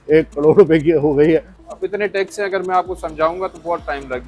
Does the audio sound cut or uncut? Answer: cut